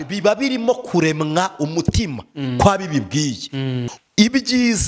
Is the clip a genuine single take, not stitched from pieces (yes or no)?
no